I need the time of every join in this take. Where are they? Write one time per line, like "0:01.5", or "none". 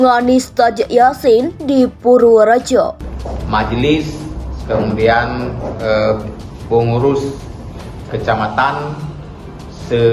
0:03.0